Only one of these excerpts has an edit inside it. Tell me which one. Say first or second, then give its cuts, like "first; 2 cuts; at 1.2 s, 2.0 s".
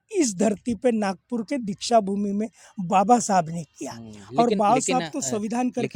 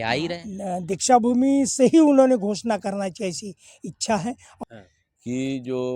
second; 1 cut; at 4.5 s